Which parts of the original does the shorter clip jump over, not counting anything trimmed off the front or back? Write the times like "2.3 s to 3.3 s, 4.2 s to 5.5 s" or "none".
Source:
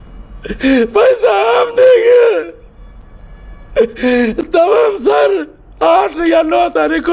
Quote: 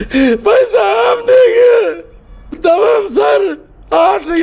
3.0 s to 4.4 s